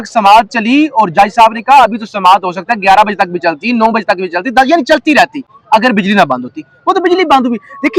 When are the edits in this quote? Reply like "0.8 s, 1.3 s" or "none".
none